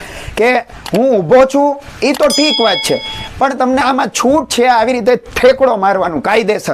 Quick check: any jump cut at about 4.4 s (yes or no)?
no